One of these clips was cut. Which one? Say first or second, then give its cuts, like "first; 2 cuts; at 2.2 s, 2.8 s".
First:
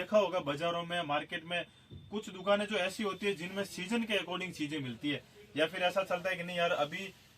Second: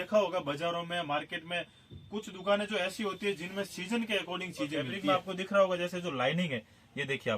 second; 1 cut; at 5.0 s